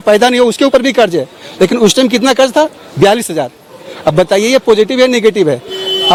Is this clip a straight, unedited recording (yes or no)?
yes